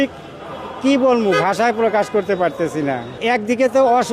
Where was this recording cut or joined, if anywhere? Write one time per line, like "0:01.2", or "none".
0:03.2